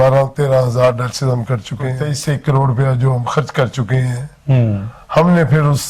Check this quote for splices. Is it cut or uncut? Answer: cut